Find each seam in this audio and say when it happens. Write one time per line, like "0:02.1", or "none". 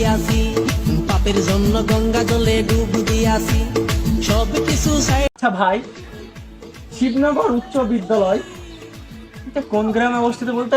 0:05.3